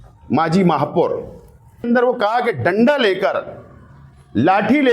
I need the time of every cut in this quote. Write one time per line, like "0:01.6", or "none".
0:01.8